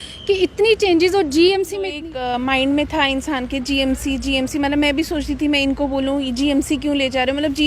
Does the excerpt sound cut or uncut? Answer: cut